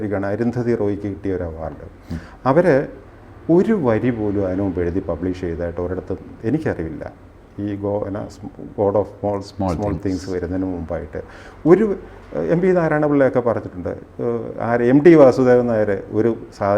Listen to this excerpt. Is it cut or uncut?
uncut